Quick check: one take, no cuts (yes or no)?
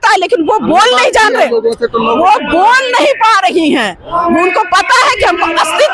yes